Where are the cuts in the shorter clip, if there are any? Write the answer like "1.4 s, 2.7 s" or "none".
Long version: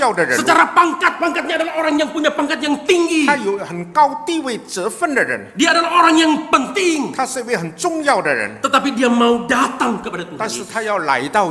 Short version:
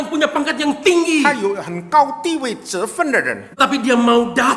3.5 s